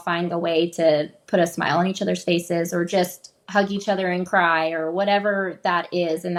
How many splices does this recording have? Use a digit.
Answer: 0